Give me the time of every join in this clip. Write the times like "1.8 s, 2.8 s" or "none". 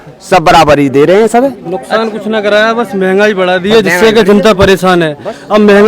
none